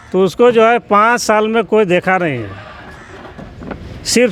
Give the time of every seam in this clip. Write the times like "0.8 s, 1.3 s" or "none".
none